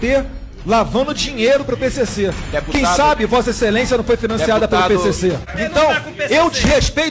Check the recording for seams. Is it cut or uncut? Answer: cut